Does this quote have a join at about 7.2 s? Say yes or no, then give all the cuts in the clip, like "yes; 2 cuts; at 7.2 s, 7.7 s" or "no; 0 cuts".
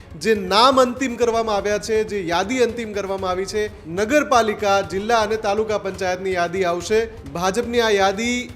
yes; 2 cuts; at 3.8 s, 7.2 s